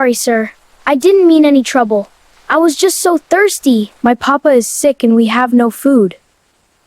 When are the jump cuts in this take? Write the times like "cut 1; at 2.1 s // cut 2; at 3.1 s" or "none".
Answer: cut 1; at 3.9 s